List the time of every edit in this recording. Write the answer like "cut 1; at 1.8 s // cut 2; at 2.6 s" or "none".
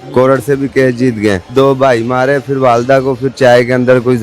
cut 1; at 1.4 s